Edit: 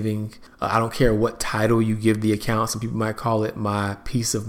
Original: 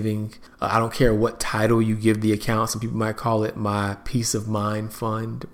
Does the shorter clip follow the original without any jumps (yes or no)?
yes